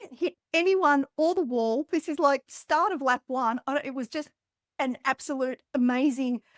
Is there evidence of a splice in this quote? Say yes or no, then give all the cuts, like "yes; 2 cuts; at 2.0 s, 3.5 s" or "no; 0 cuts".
no; 0 cuts